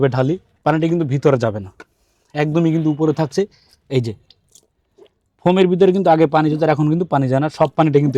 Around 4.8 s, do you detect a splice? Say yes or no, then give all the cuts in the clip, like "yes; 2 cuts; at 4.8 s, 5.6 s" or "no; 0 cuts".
no; 0 cuts